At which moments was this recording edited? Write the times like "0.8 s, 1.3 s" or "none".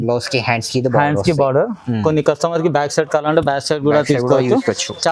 none